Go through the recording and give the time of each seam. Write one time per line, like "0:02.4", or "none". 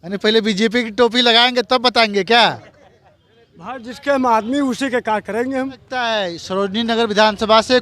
0:06.1